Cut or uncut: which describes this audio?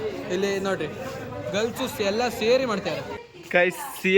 cut